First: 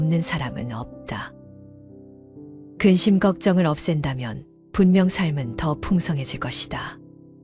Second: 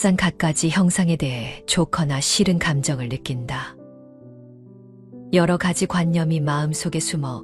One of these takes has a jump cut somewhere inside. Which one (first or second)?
first